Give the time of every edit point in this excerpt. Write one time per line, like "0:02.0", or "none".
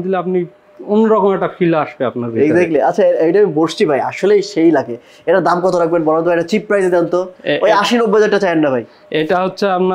none